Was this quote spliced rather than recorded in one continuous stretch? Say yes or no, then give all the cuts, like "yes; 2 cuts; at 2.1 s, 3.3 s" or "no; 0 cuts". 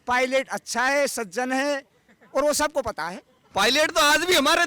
yes; 1 cut; at 3.3 s